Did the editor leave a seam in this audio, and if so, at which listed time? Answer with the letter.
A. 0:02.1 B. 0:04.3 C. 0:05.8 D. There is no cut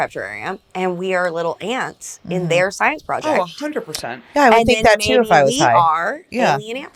D